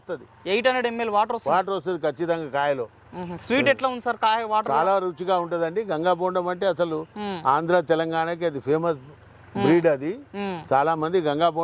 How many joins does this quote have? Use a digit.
0